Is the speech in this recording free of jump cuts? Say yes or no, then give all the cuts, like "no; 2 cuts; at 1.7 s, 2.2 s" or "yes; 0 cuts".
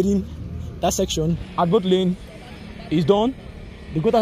no; 1 cut; at 1.4 s